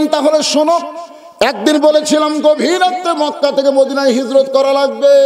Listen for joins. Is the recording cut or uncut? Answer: uncut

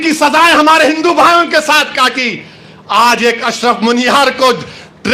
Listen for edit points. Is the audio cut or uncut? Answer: uncut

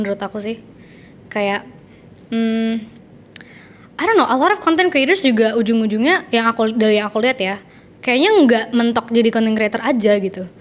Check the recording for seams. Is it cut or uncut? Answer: uncut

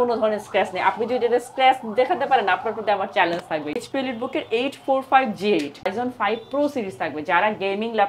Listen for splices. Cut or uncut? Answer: cut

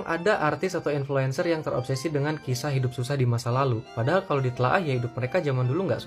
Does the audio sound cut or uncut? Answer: uncut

